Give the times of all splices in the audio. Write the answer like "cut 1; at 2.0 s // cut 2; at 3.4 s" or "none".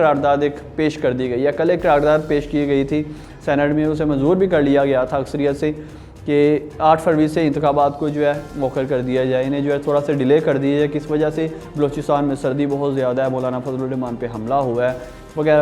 none